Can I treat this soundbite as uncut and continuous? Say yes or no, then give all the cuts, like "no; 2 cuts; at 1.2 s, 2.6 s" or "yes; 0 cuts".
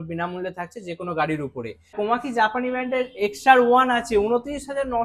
no; 1 cut; at 1.9 s